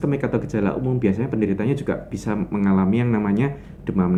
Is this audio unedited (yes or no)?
yes